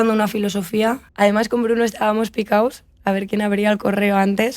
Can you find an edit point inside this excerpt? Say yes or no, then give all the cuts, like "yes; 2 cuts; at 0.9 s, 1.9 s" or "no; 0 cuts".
yes; 1 cut; at 1.0 s